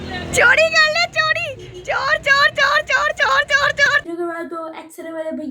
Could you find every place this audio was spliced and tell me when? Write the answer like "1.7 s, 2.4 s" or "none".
4.0 s

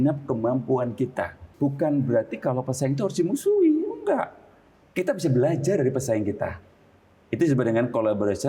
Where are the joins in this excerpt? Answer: 1.4 s

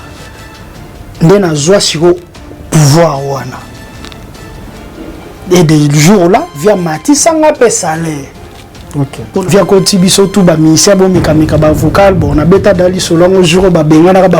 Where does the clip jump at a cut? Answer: 9.4 s

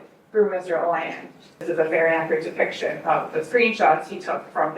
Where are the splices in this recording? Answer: 1.6 s

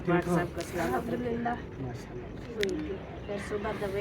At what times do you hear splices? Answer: 2.5 s

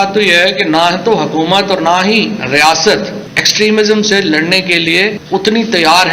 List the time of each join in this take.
none

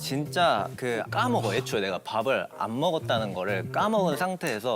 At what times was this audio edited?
1.1 s

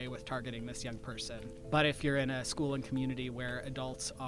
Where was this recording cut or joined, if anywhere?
1.5 s

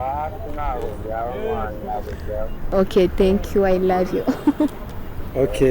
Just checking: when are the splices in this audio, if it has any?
2.6 s

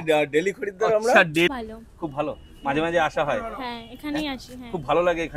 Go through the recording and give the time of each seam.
1.5 s

